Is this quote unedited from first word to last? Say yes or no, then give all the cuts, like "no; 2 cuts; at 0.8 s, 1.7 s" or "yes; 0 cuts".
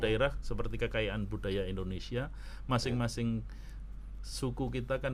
yes; 0 cuts